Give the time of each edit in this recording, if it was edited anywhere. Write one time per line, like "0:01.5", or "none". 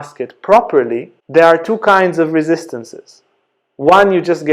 0:01.1